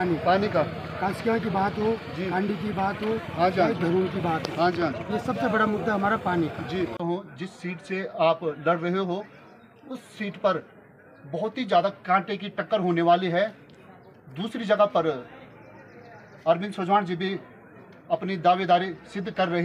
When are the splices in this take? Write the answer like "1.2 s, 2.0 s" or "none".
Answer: 7.0 s